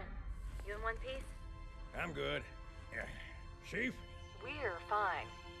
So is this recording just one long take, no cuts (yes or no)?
yes